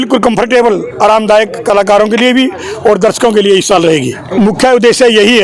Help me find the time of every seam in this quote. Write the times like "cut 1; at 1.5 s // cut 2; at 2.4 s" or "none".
cut 1; at 4.3 s